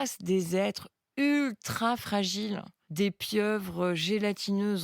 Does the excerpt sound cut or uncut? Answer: cut